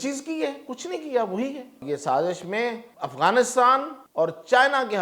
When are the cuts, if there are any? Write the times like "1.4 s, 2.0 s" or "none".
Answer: 1.8 s, 2.9 s, 4.0 s